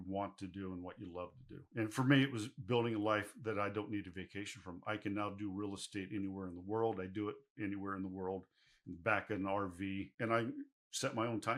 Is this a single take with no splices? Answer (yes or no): yes